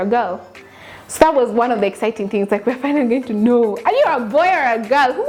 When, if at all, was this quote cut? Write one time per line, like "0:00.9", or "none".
none